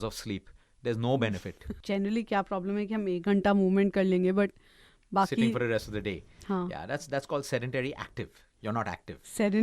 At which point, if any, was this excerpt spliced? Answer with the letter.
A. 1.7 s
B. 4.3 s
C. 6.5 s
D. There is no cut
A